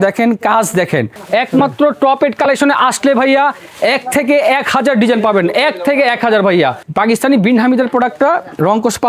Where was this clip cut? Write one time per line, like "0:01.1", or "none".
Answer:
0:01.2
0:06.8